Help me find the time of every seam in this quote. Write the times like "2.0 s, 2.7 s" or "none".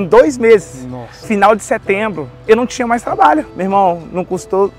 1.1 s, 3.5 s